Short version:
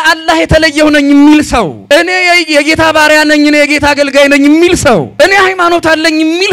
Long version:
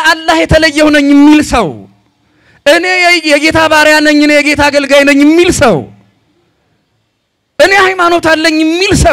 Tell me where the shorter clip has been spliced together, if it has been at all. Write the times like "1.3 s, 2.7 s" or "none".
1.8 s, 5.1 s